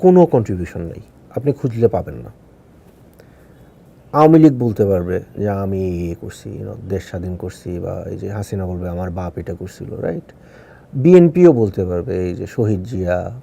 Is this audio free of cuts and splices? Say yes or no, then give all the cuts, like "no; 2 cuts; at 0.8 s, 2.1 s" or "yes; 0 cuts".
no; 1 cut; at 3.4 s